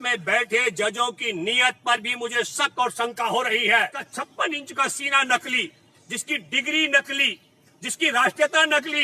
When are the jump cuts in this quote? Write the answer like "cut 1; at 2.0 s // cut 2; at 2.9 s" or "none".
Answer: cut 1; at 4.0 s